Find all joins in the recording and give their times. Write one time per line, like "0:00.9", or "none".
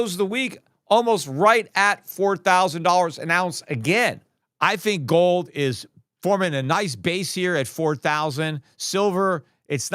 0:04.5